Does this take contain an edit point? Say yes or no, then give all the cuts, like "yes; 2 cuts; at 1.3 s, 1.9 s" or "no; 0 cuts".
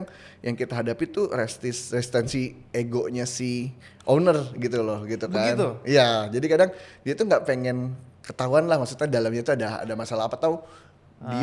no; 0 cuts